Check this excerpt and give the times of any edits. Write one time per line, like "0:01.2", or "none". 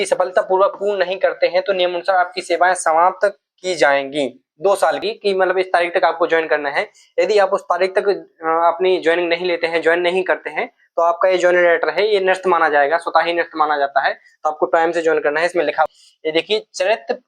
0:05.0
0:15.9